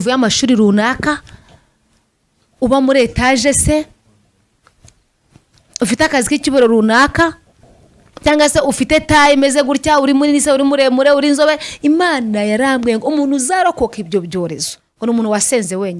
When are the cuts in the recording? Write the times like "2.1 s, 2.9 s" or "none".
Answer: none